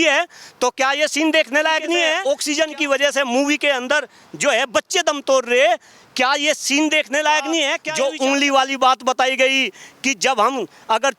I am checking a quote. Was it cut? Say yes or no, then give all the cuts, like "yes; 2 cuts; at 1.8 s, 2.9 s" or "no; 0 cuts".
yes; 2 cuts; at 2.2 s, 7.8 s